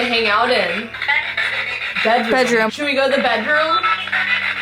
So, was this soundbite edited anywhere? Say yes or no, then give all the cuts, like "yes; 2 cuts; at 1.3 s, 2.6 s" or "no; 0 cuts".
yes; 2 cuts; at 1.0 s, 2.7 s